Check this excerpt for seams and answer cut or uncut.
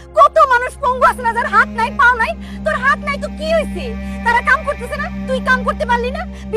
uncut